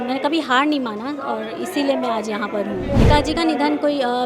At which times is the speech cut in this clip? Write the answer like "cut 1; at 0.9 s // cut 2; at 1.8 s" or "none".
cut 1; at 2.9 s